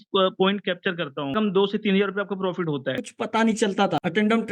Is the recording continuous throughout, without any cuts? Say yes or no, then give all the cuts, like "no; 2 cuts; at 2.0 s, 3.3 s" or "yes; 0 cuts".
no; 2 cuts; at 1.3 s, 3.0 s